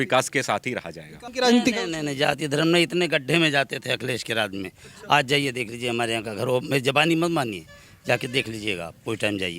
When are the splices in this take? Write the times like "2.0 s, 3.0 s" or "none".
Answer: 1.2 s